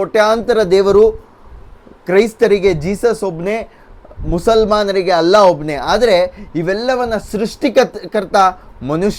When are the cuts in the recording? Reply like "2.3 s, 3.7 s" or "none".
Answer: none

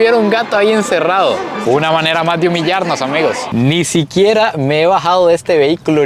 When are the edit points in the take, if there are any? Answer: 1.6 s, 3.4 s

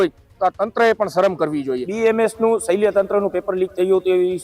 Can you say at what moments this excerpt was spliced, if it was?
1.9 s

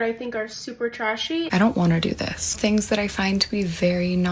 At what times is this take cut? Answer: 1.5 s

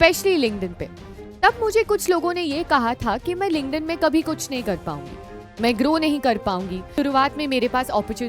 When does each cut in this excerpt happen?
7.0 s

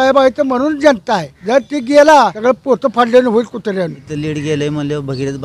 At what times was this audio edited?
1.3 s, 2.4 s, 4.1 s

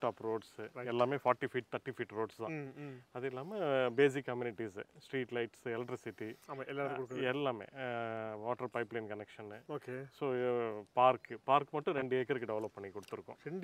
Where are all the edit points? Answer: none

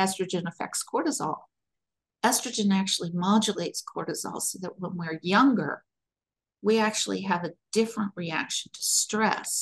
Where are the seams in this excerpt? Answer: none

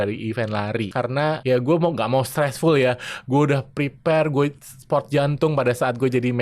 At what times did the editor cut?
1.0 s

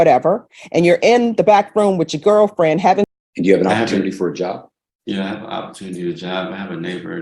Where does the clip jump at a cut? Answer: 3.1 s

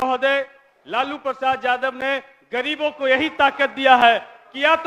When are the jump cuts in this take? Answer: none

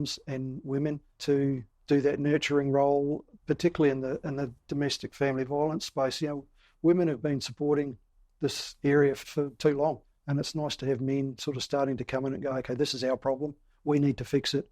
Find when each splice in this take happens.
1.4 s, 3.3 s, 9.2 s, 10.1 s

